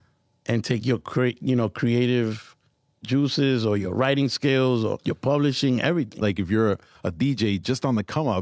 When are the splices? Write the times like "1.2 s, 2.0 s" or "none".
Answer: 5.0 s, 6.2 s